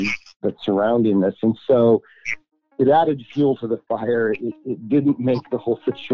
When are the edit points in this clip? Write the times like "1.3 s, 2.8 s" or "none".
none